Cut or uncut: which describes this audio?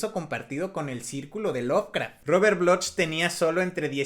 cut